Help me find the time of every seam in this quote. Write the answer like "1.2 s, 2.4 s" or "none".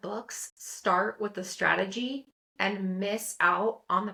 none